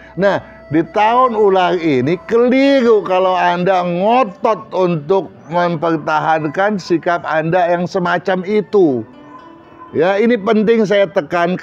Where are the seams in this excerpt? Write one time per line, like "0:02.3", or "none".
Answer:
none